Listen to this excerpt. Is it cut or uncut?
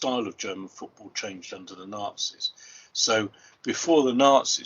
uncut